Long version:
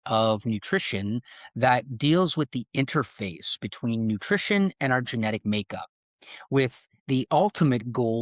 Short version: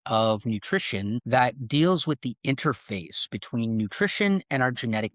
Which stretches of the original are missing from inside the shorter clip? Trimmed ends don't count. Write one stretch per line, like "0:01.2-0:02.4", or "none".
0:01.2-0:01.5